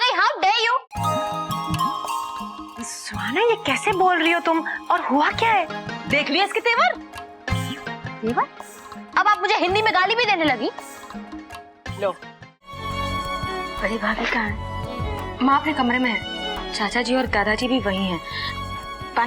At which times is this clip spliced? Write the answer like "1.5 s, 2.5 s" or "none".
12.7 s